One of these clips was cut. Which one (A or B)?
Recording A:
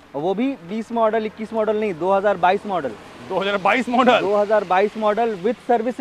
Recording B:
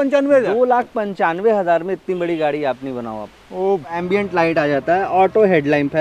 B